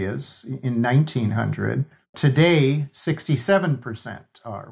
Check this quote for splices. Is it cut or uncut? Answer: cut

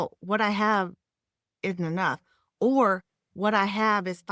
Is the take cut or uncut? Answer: uncut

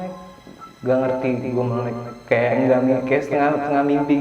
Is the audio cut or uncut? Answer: uncut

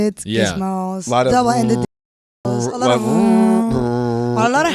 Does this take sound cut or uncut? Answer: uncut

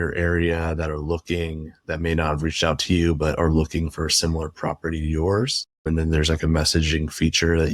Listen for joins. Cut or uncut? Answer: uncut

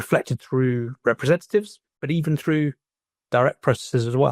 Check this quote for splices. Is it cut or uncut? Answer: cut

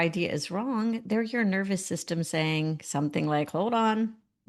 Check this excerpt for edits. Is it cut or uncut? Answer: uncut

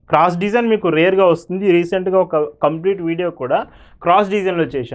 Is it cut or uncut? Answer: uncut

